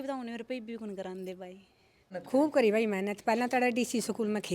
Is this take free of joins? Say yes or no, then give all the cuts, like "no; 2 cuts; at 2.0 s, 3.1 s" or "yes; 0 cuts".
no; 1 cut; at 2.1 s